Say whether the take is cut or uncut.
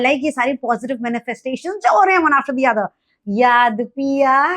cut